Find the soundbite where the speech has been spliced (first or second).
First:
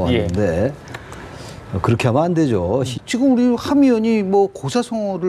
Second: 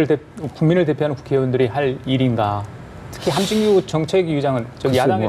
first